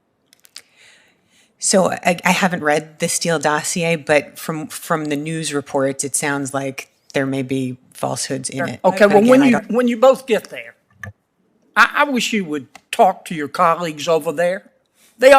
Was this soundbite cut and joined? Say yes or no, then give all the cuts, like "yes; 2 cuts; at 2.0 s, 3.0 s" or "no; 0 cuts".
yes; 1 cut; at 8.6 s